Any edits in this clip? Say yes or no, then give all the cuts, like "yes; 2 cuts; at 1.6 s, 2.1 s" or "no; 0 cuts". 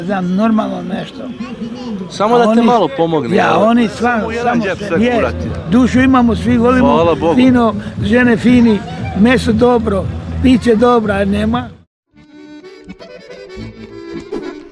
yes; 2 cuts; at 4.7 s, 11.8 s